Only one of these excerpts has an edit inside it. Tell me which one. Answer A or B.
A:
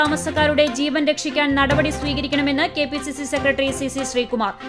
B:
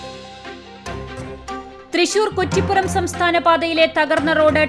B